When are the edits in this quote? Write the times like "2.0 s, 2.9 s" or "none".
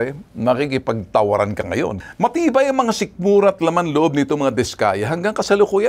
2.0 s